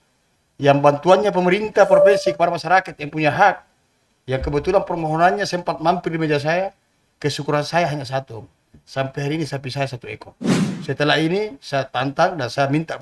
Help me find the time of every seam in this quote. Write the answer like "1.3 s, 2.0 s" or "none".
10.4 s